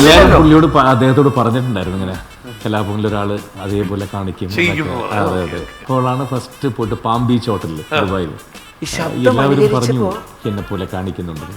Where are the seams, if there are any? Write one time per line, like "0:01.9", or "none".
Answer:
0:05.8
0:08.4